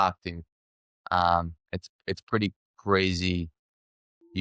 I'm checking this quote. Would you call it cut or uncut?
uncut